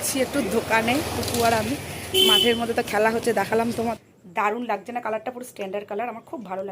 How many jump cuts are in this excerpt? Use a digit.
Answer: 1